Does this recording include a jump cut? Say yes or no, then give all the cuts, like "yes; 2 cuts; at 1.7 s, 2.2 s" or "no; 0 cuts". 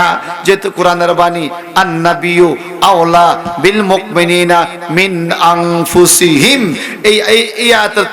no; 0 cuts